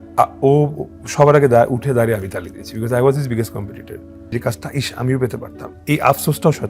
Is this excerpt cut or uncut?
cut